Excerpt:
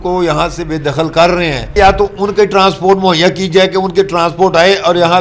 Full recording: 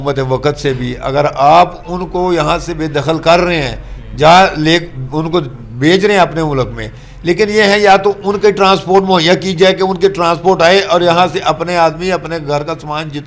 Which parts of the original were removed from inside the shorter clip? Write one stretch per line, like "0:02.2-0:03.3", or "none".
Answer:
0:03.8-0:07.8